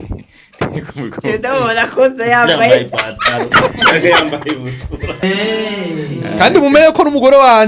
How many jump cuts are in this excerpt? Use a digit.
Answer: 1